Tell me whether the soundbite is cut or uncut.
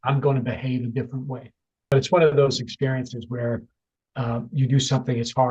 cut